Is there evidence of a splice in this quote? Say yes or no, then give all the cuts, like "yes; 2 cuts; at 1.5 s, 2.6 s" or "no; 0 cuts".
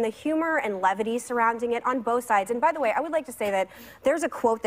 no; 0 cuts